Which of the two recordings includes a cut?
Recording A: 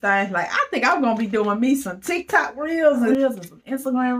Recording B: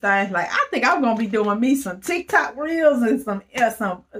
A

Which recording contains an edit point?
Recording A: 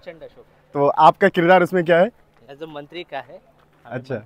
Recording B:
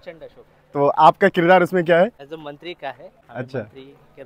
B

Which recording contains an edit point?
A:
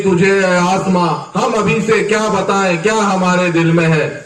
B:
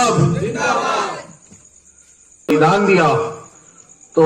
B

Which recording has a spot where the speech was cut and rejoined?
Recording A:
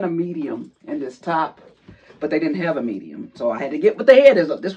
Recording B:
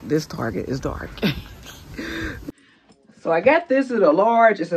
B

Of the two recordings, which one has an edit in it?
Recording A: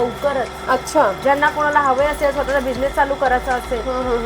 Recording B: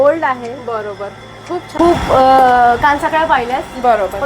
B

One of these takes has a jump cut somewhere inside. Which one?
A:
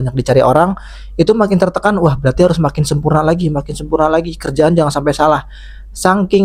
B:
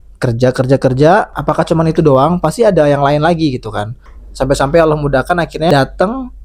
B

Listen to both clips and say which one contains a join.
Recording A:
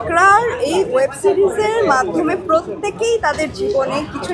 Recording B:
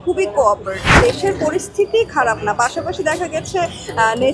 B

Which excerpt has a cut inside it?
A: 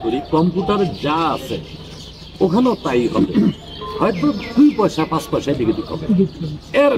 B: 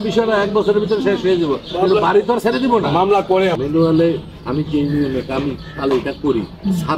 B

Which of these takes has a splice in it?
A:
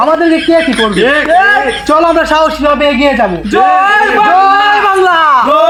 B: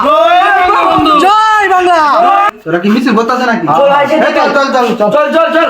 B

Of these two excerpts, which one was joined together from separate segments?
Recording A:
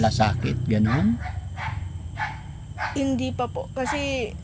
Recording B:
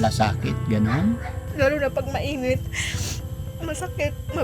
B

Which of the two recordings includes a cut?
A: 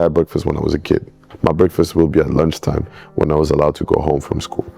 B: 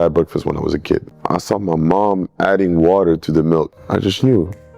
B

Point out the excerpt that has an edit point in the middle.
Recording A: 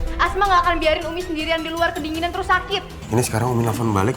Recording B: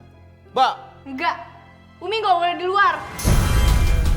A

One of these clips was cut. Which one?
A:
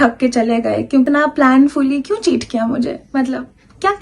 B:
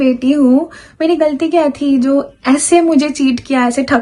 A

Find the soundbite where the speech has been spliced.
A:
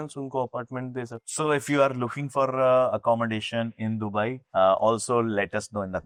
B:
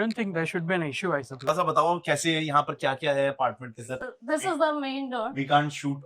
B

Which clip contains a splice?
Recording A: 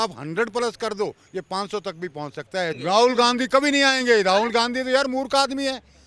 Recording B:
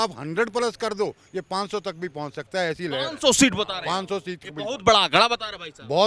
A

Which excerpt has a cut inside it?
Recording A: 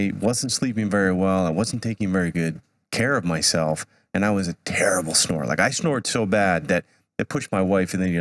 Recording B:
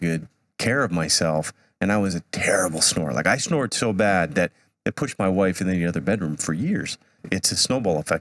B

